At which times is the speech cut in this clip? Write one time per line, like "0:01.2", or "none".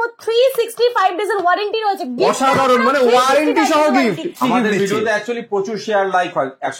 0:04.4